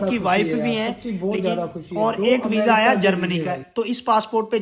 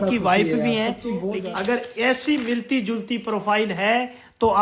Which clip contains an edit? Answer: second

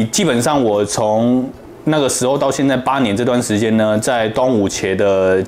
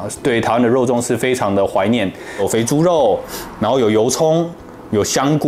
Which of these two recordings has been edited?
second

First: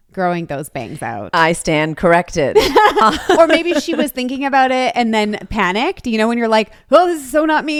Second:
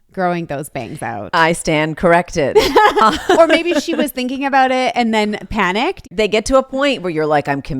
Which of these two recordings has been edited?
second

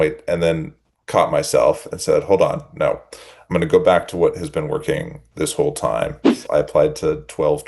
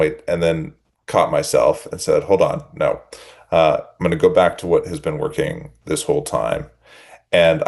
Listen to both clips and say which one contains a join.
first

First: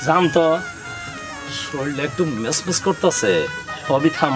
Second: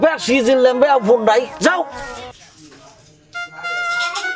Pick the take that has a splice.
second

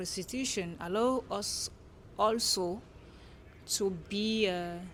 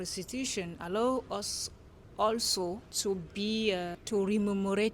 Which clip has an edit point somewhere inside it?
second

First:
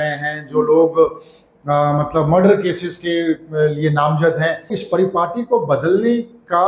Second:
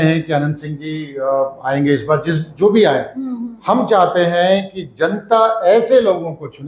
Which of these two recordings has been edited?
first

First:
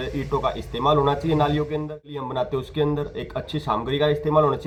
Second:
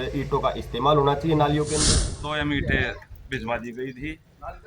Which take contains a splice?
second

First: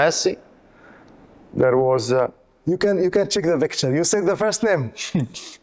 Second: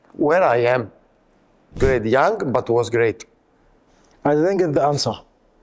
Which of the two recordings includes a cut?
second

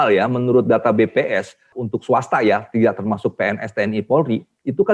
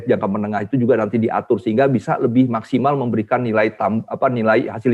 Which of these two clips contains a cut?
first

